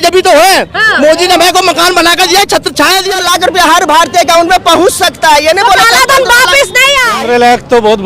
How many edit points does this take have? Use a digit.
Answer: 2